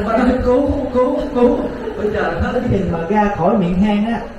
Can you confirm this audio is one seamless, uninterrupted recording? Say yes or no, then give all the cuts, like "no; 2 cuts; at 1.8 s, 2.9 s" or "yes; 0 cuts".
no; 1 cut; at 2.6 s